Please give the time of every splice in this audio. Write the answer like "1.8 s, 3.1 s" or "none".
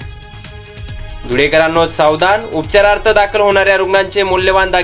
1.1 s